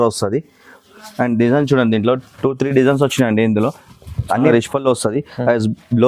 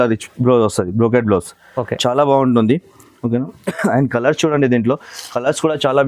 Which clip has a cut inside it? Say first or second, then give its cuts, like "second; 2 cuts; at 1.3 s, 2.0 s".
first; 1 cut; at 4.5 s